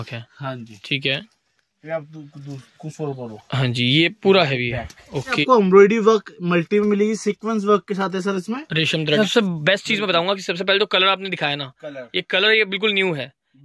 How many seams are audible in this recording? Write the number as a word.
two